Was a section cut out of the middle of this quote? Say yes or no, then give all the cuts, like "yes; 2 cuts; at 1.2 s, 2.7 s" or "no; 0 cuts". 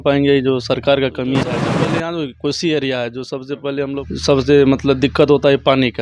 yes; 2 cuts; at 1.6 s, 4.0 s